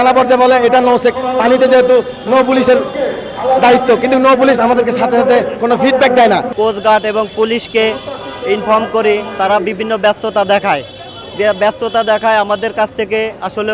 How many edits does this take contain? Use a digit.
1